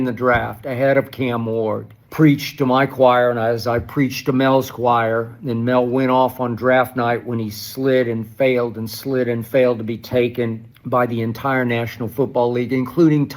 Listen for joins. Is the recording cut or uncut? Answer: cut